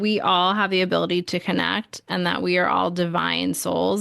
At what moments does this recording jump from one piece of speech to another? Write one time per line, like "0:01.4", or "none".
none